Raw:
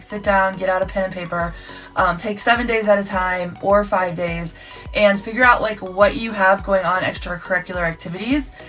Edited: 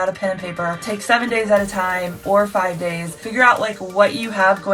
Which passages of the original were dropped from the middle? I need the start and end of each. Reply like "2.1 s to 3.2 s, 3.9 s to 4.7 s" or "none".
1.6 s to 2.2 s, 4.6 s to 5.3 s